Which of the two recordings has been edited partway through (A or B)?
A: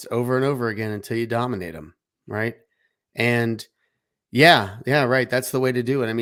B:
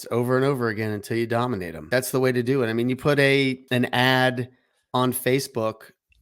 B